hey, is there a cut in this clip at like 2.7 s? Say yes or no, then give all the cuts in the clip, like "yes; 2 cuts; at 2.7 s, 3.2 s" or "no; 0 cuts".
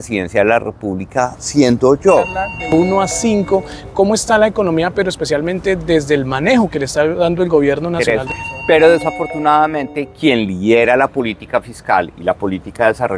yes; 2 cuts; at 2.7 s, 8.0 s